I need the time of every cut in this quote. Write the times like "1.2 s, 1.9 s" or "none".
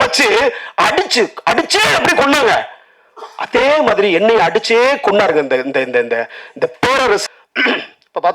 7.2 s